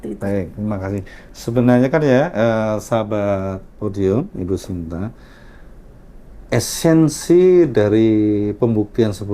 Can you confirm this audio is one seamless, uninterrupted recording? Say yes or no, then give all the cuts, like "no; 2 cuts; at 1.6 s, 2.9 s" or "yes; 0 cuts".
yes; 0 cuts